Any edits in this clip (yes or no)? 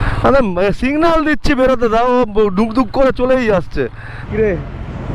yes